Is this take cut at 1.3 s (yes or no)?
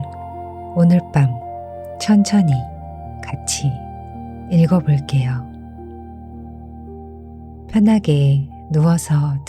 no